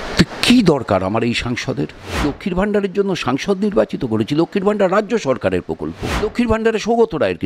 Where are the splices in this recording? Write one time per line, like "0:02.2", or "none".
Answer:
0:02.2
0:06.2